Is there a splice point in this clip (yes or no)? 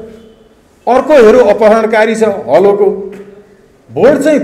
no